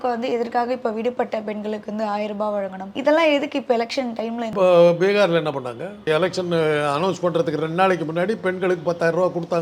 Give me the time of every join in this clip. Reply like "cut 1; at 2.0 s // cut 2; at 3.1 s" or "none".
cut 1; at 2.9 s // cut 2; at 4.5 s // cut 3; at 6.1 s